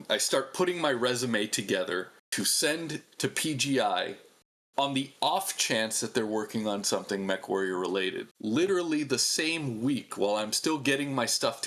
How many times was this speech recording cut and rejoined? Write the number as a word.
two